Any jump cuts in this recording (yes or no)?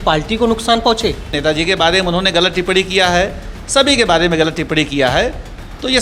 yes